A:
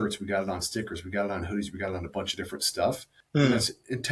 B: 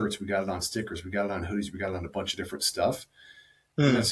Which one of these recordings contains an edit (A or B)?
A